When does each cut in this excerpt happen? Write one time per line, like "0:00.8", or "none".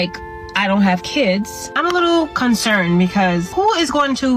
0:01.6
0:03.5

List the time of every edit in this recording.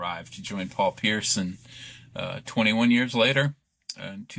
none

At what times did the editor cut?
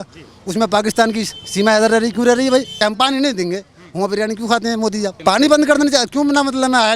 0:02.8
0:05.2

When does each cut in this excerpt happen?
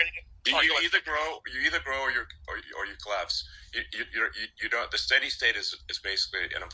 none

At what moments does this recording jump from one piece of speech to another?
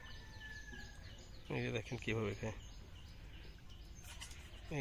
none

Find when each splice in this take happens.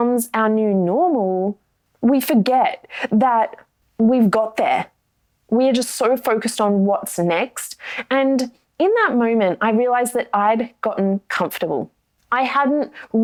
none

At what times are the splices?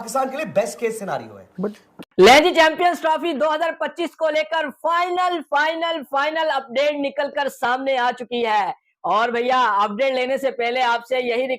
0:01.9

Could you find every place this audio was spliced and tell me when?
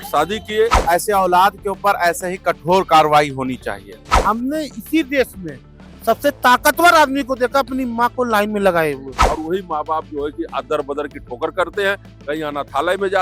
0:00.8
0:04.1
0:09.1

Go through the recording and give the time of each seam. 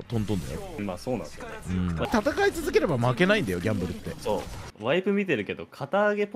0:02.1
0:04.6

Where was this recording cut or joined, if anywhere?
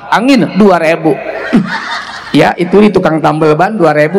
none

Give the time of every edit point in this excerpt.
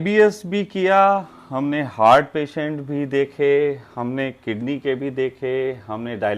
none

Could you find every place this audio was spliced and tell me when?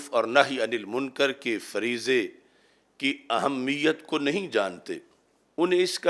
none

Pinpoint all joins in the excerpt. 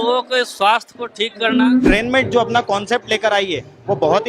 0:01.9

